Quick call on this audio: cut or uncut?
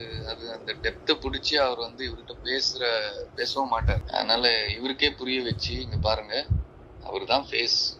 cut